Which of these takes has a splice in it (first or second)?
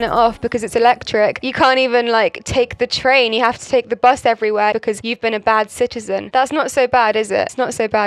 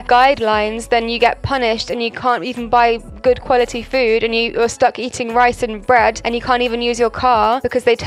first